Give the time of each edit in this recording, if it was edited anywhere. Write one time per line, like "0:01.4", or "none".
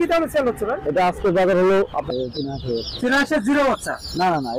0:02.1